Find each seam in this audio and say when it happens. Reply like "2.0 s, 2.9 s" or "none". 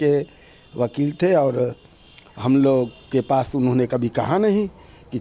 none